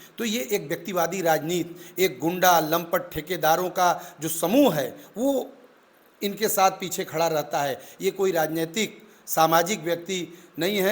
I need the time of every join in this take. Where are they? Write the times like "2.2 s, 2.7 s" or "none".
none